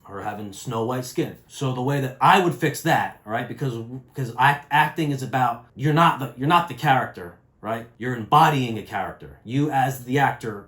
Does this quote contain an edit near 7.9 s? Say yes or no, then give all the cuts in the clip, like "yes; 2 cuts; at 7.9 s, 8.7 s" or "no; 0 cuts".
yes; 3 cuts; at 1.4 s, 5.7 s, 7.9 s